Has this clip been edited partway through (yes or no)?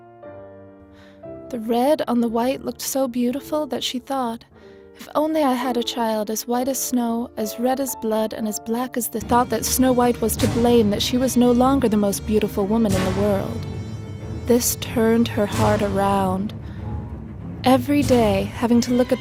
no